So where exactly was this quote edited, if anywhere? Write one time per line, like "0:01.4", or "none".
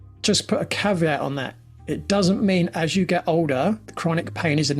0:03.9